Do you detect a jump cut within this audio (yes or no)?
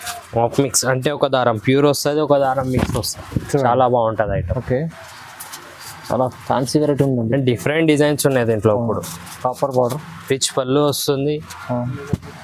no